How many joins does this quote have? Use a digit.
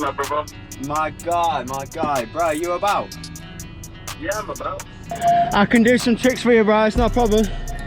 1